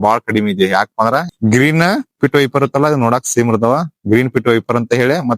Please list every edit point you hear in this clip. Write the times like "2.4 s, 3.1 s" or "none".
1.3 s